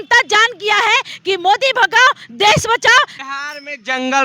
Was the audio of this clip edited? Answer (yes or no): yes